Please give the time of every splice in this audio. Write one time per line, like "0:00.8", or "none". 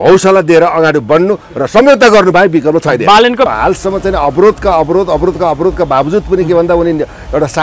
0:03.5

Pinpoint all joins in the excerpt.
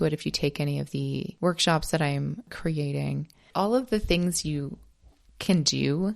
0:01.3
0:02.5
0:03.4

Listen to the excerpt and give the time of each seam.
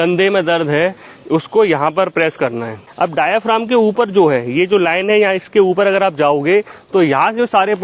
none

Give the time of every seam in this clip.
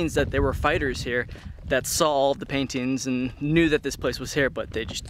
none

